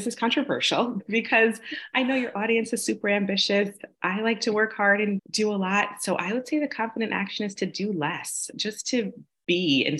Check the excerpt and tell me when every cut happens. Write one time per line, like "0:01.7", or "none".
0:01.0
0:05.2
0:08.5

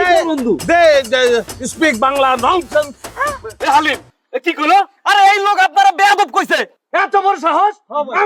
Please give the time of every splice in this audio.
none

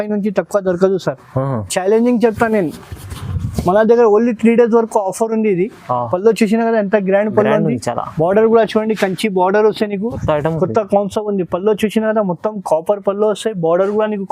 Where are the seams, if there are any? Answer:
0:10.2

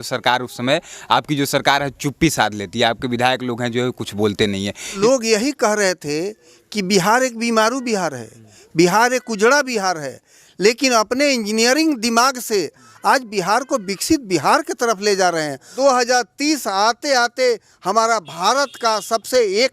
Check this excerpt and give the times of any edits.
0:05.0
0:15.7

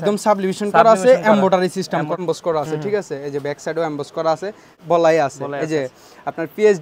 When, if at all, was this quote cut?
0:02.1
0:04.8

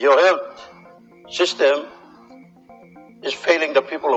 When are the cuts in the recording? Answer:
none

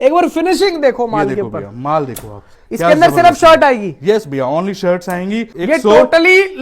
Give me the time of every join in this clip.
0:05.5

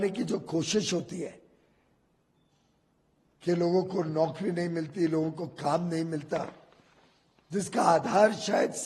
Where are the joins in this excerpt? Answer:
none

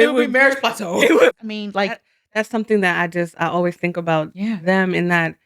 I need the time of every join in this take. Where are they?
0:01.4

